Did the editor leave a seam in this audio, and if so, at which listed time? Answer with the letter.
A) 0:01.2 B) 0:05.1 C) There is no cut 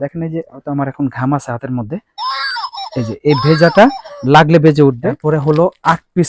B